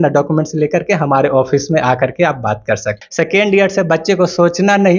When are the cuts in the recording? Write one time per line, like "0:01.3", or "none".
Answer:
0:03.0